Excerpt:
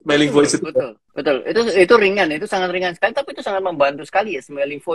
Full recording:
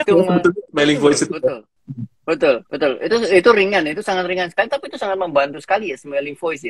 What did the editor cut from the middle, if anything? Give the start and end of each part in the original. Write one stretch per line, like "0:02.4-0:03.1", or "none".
0:01.8-0:02.7